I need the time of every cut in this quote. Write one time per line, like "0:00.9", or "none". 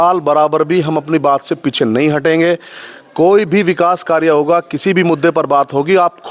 none